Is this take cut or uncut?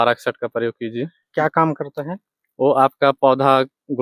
cut